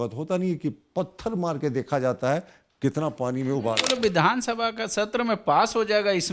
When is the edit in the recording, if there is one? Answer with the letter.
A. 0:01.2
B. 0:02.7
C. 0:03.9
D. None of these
C